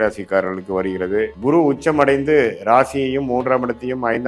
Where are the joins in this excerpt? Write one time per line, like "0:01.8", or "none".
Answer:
0:01.4